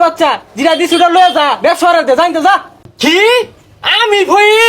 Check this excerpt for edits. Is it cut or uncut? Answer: uncut